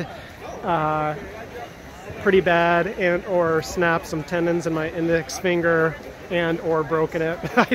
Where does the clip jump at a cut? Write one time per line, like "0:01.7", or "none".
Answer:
none